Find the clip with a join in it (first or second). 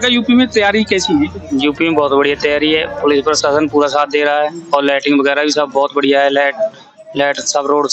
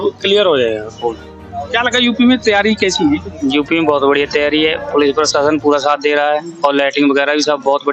second